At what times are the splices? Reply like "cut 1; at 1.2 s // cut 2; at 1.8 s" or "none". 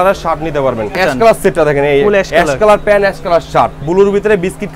cut 1; at 1.0 s // cut 2; at 3.9 s